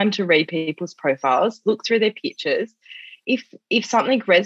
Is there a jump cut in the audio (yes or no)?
no